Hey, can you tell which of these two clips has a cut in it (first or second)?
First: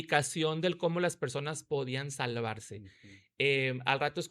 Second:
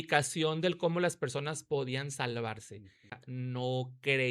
second